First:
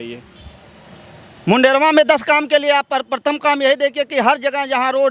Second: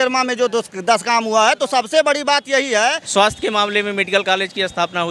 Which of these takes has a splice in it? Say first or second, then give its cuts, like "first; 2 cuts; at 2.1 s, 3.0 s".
second; 1 cut; at 3.0 s